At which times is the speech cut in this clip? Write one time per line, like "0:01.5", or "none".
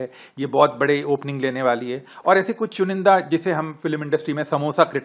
none